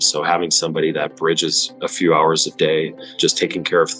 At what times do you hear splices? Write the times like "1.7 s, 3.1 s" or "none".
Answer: 3.1 s